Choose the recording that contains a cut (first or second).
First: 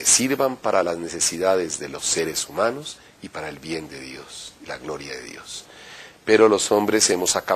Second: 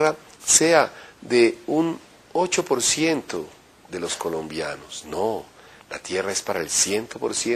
second